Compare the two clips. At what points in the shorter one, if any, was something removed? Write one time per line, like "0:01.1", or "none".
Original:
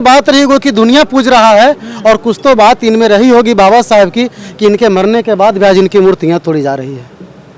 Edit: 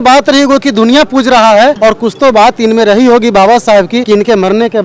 0:01.8
0:04.0